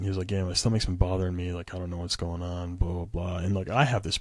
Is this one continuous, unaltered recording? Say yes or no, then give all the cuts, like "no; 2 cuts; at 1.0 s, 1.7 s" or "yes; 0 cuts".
yes; 0 cuts